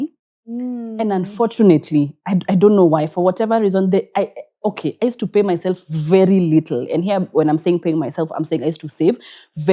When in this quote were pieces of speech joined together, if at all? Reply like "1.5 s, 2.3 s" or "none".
none